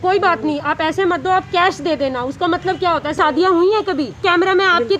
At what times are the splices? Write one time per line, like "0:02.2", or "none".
0:03.2
0:04.2